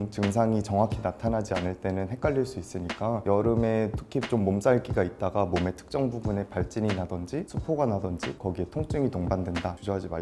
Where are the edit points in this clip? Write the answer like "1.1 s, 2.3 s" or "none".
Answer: 3.2 s